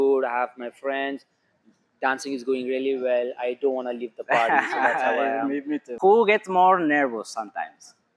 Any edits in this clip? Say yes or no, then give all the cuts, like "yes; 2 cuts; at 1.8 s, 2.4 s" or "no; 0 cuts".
yes; 1 cut; at 5.8 s